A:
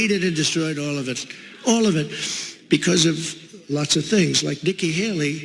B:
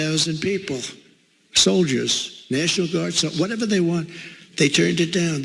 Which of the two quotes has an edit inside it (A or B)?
A